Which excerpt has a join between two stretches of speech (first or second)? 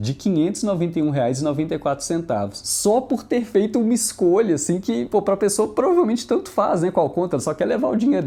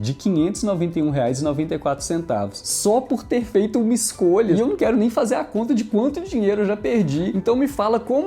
second